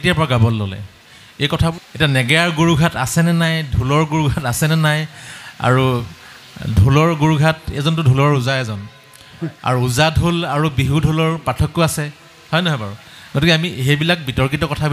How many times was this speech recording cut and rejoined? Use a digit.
1